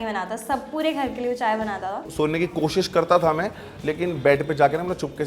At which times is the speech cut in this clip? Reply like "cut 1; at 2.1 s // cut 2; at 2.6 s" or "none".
cut 1; at 2.1 s